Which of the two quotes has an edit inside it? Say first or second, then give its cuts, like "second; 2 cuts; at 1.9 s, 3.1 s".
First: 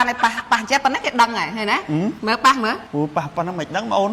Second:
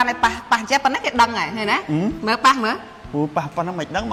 first; 1 cut; at 2.8 s